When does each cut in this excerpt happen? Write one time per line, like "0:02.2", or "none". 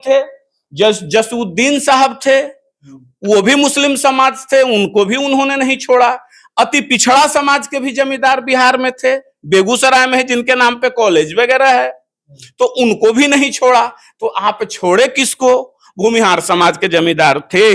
none